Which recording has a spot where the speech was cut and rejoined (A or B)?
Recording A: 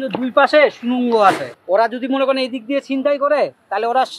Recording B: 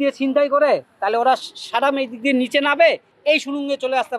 A